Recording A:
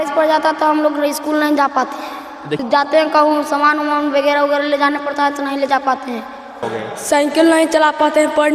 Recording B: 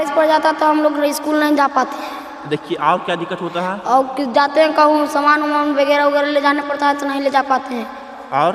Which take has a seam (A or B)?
A